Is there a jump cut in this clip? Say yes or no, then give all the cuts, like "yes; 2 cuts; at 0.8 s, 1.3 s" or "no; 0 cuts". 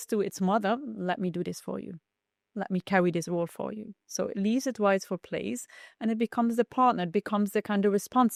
no; 0 cuts